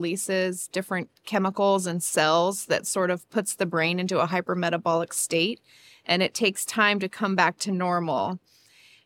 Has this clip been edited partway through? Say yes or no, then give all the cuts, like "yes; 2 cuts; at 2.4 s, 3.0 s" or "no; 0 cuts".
no; 0 cuts